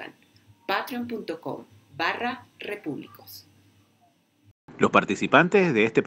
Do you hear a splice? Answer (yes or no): yes